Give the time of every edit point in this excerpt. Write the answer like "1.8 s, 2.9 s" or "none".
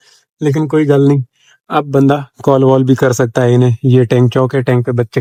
none